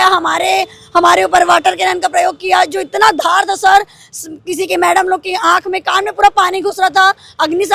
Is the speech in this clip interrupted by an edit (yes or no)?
no